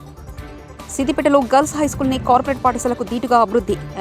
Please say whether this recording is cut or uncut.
cut